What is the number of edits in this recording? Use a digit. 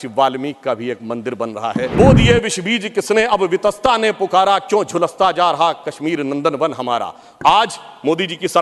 1